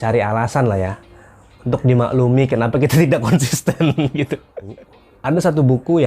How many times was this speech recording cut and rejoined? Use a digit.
1